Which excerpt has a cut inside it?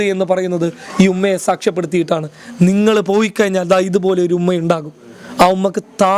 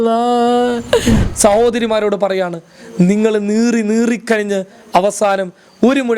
second; 1 cut; at 1.3 s

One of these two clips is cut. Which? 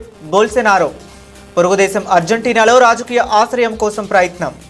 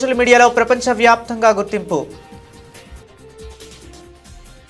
second; 1 cut; at 2.2 s

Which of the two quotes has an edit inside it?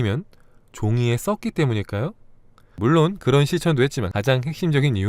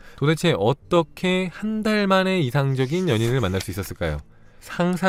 first; 2 cuts; at 2.8 s, 4.0 s

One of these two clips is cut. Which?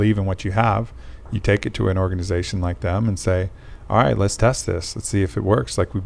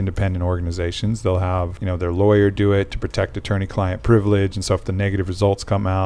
second; 1 cut; at 1.8 s

